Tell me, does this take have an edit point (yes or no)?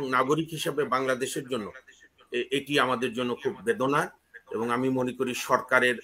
no